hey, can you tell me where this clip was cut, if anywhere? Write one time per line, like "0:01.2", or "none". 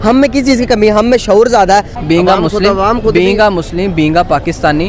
none